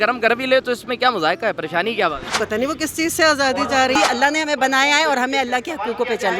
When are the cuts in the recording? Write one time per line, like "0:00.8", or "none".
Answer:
0:02.3
0:04.0